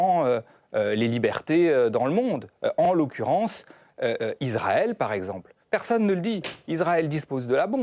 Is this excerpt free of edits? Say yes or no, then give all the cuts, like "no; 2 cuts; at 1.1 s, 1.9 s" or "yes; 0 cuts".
yes; 0 cuts